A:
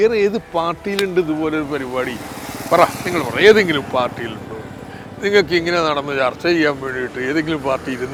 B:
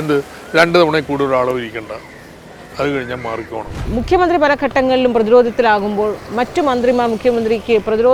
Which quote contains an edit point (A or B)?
B